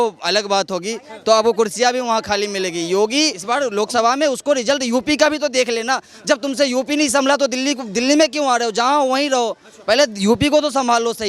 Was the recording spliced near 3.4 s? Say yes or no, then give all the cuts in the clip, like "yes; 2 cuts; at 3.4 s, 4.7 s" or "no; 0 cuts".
yes; 1 cut; at 3.4 s